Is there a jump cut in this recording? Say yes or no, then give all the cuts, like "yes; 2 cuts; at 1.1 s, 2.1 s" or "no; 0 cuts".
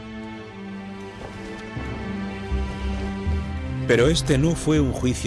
yes; 1 cut; at 2.1 s